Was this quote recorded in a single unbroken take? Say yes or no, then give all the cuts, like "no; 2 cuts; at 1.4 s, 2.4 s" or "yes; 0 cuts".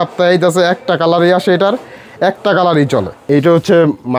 no; 1 cut; at 3.2 s